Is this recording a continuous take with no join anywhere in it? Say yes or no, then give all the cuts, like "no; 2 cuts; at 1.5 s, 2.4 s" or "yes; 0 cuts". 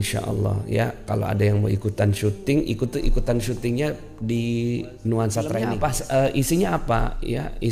no; 1 cut; at 5.7 s